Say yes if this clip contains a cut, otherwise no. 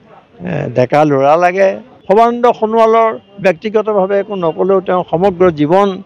yes